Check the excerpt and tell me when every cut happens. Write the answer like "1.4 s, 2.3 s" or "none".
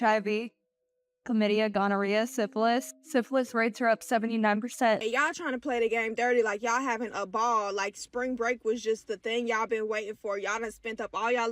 5.0 s